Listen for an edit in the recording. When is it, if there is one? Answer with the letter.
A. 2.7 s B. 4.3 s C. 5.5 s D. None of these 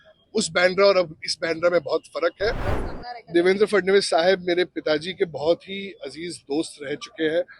A